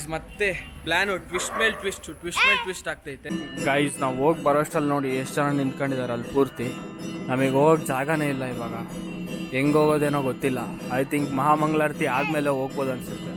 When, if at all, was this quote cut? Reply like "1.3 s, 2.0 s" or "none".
none

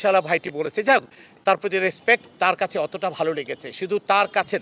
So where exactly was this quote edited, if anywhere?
none

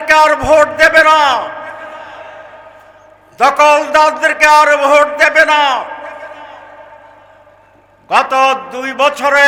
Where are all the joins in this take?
none

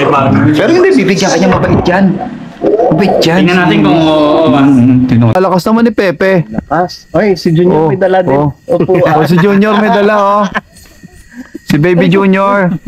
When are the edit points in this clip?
5.3 s

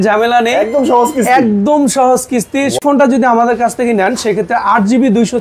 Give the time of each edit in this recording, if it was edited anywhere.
2.8 s

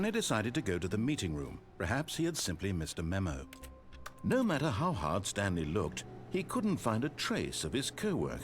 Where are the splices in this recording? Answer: 4.0 s

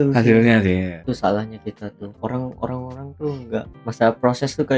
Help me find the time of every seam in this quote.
1.0 s, 2.1 s, 3.7 s

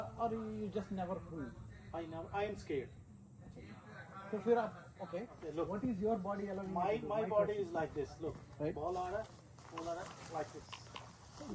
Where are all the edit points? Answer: 5.3 s

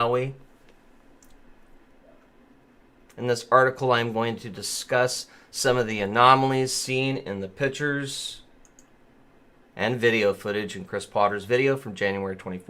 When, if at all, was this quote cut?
5.4 s

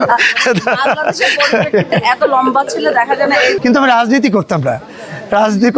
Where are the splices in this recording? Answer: 3.6 s

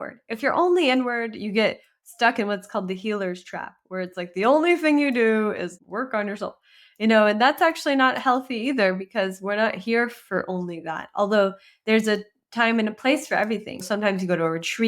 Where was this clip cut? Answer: 13.8 s

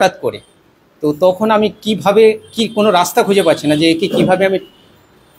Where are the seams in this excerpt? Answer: none

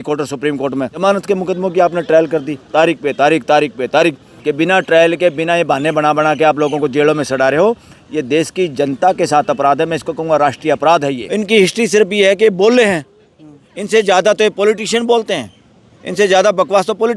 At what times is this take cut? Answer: 1.0 s, 4.3 s, 11.2 s

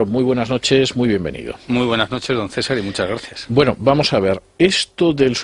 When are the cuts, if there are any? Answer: none

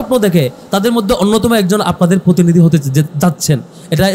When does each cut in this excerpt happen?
none

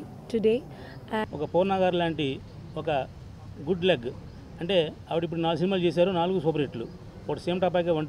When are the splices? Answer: 1.2 s

